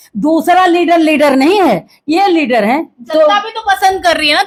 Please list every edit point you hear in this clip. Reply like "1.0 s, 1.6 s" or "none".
none